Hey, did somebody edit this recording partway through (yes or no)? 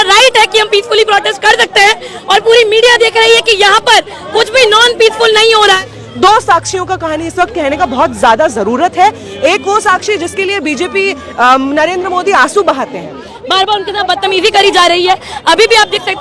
yes